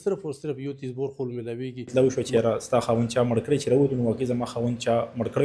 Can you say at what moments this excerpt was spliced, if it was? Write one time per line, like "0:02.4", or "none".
0:01.9